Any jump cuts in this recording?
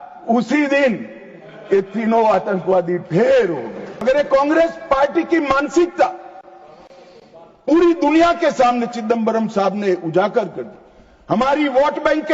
yes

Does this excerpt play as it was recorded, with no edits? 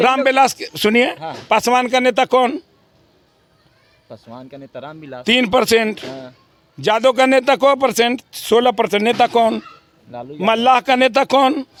yes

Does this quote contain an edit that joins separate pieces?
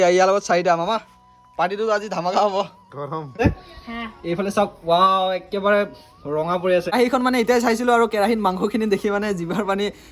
yes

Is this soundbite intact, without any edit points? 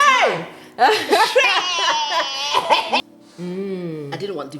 no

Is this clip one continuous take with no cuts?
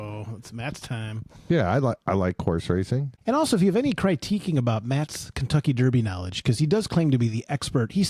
no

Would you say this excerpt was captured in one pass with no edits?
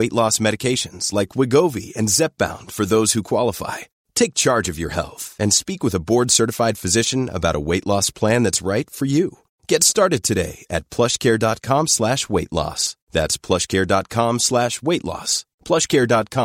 yes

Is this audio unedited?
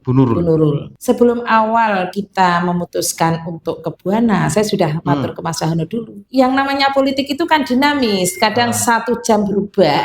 no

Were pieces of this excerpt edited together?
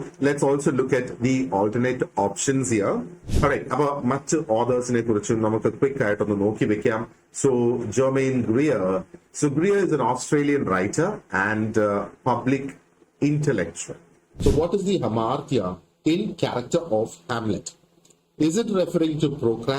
yes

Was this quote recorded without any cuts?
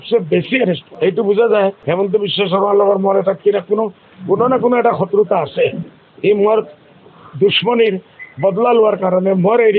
no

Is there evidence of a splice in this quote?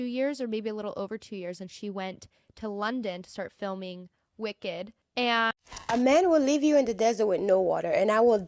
yes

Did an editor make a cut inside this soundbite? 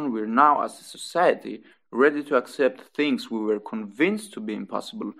no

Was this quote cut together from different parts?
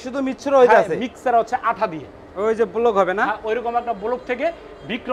yes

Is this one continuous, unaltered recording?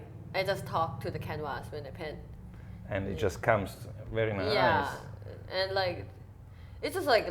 yes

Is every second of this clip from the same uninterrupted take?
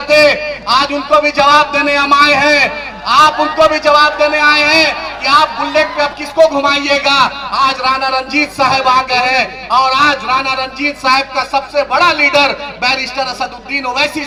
yes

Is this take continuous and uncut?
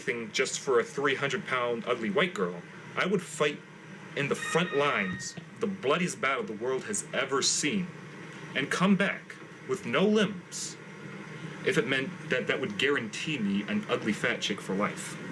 yes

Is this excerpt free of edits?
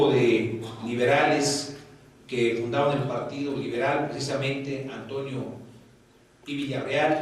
no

